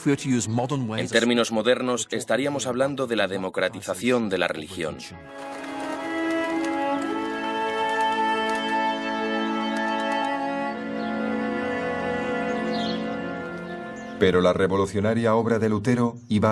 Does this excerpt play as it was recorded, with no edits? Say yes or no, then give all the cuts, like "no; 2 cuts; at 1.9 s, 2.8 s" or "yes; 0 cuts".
no; 1 cut; at 8.4 s